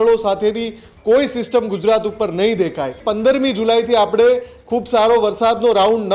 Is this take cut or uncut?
cut